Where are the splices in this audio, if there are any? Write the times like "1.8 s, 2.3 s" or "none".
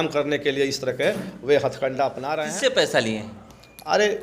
2.3 s